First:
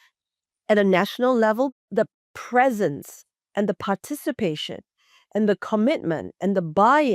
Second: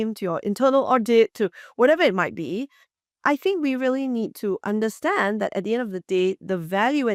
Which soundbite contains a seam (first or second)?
first